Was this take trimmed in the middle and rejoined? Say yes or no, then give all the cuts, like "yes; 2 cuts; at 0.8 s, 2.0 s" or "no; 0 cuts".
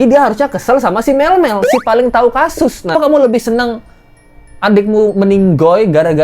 yes; 1 cut; at 2.9 s